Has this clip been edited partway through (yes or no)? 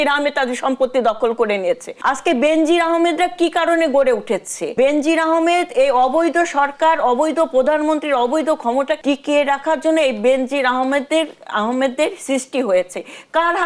yes